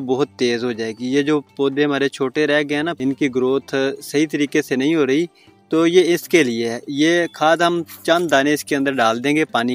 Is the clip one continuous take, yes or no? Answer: no